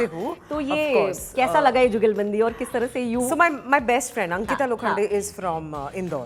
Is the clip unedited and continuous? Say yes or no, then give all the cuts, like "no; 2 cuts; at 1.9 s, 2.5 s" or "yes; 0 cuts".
yes; 0 cuts